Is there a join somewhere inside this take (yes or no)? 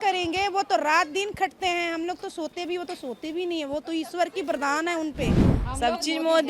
yes